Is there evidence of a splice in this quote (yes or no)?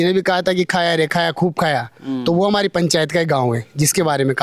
no